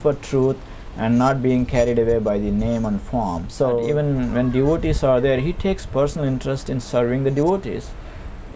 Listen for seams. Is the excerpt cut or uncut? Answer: cut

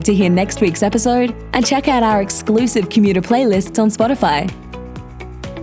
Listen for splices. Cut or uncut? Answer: uncut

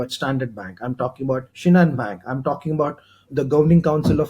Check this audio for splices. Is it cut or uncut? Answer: cut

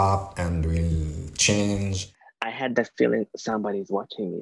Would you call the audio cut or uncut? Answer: cut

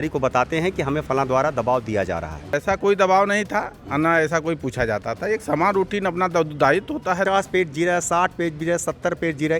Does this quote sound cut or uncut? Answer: cut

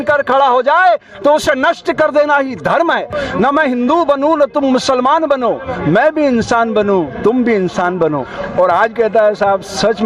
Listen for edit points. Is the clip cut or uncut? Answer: cut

